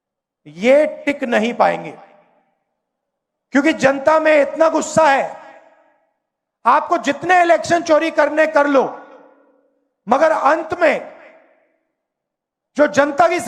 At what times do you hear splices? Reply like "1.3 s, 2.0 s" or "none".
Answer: none